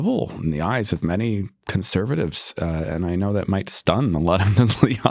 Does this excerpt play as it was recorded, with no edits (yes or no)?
yes